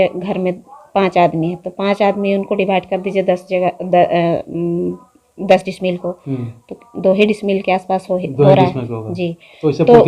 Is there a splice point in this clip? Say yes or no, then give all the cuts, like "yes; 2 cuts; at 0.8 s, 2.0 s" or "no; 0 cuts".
no; 0 cuts